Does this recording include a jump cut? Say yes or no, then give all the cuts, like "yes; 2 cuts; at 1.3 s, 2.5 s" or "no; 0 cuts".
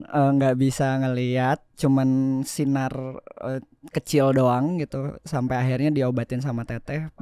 no; 0 cuts